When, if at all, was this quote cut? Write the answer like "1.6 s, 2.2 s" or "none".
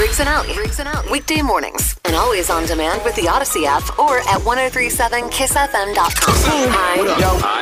6.3 s